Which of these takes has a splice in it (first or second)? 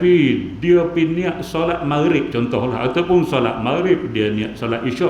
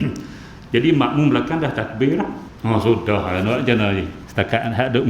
second